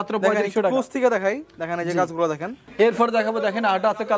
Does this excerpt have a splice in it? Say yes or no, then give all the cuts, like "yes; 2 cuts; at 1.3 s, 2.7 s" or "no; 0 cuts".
yes; 1 cut; at 2.7 s